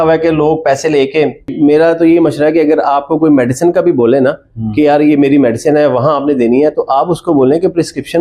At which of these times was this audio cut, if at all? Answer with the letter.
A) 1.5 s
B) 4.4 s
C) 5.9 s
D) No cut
A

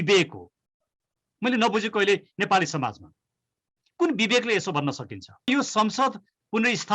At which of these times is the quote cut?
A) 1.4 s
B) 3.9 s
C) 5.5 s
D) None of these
C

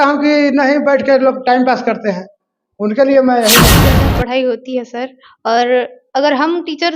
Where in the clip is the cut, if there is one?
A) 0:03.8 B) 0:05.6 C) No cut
A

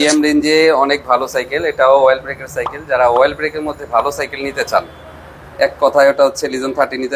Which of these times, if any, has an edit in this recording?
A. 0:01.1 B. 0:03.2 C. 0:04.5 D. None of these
D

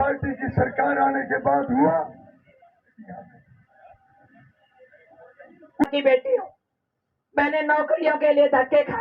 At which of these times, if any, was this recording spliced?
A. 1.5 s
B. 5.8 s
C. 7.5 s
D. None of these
B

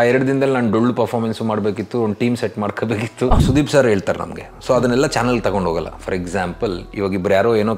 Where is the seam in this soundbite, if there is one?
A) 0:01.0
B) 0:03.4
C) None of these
B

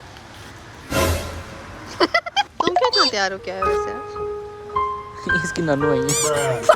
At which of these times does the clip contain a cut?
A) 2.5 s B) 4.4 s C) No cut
A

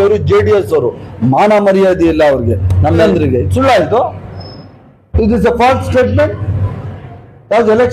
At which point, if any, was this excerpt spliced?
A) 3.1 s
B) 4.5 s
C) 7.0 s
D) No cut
A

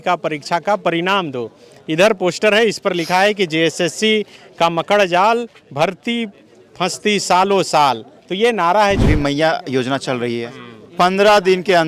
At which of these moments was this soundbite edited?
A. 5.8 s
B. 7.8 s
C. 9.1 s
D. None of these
C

